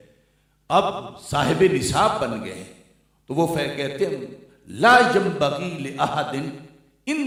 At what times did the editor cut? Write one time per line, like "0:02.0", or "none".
none